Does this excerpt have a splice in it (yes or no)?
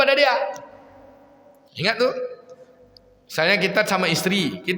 no